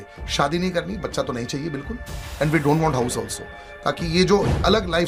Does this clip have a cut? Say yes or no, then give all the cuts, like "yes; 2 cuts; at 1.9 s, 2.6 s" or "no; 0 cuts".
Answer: no; 0 cuts